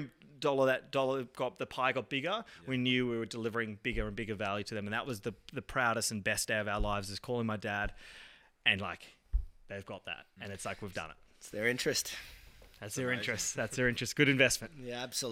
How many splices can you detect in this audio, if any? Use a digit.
0